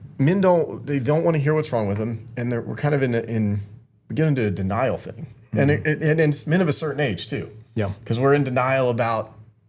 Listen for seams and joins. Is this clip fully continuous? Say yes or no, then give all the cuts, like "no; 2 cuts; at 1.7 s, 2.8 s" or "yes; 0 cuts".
yes; 0 cuts